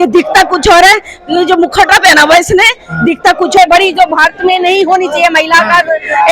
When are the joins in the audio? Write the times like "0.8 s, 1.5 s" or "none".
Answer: 3.6 s